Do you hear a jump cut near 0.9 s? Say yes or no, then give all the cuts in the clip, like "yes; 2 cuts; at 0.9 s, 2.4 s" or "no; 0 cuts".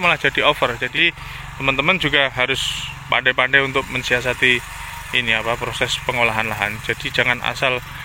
yes; 1 cut; at 0.9 s